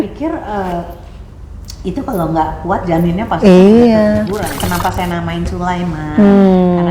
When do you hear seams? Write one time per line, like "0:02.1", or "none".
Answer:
0:04.6